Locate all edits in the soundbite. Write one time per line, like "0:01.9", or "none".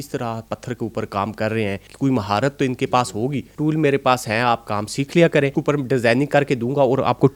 0:01.9
0:03.5
0:05.6